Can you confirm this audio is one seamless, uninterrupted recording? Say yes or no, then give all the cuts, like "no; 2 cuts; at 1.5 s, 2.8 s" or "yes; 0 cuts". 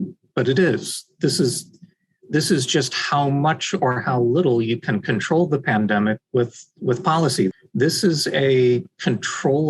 no; 1 cut; at 7.6 s